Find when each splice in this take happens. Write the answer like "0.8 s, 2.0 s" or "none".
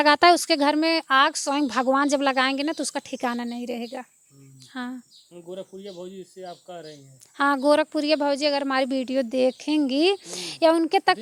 none